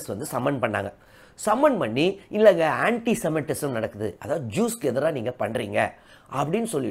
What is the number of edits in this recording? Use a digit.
0